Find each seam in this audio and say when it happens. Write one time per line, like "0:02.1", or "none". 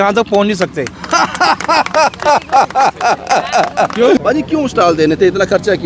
0:04.2